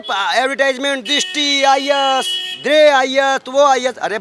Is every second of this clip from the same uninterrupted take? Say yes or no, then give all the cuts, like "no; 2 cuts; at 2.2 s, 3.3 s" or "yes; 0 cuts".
yes; 0 cuts